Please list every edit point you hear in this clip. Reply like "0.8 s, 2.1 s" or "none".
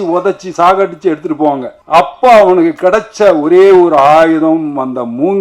1.7 s